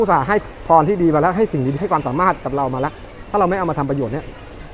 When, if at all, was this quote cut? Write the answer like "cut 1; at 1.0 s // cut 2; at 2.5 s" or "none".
none